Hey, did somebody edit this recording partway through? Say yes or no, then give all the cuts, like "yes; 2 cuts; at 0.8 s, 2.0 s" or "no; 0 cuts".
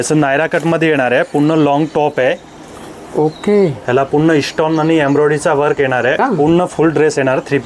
yes; 1 cut; at 6.2 s